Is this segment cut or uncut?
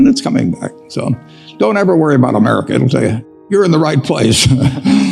cut